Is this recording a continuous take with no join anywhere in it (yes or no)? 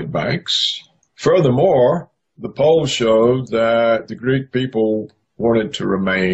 yes